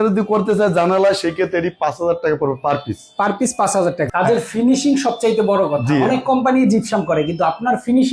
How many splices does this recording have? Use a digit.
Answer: 1